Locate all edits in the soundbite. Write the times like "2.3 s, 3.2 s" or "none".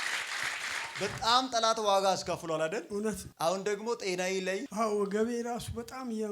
1.0 s, 3.3 s